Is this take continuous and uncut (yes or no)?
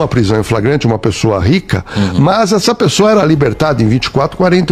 yes